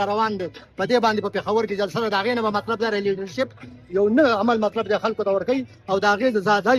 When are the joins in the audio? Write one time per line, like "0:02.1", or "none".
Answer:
none